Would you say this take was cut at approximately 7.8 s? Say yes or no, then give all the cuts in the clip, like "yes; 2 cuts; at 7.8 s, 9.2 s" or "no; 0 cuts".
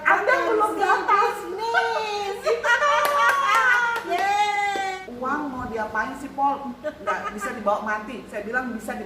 no; 1 cut; at 5.0 s